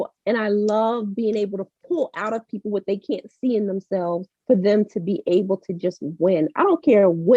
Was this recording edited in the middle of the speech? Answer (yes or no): no